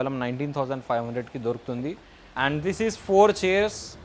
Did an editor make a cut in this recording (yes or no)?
yes